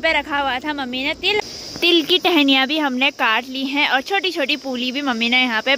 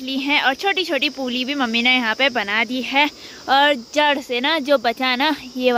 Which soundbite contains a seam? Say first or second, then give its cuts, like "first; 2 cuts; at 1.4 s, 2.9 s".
first; 1 cut; at 1.4 s